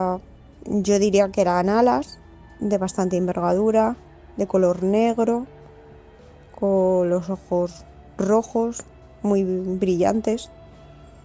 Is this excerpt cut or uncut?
uncut